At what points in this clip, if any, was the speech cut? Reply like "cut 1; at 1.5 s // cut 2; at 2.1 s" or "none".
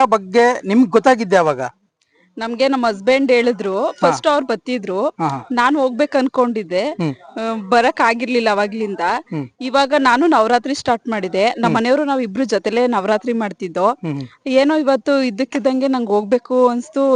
none